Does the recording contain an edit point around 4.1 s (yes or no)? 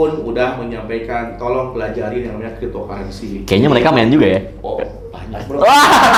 no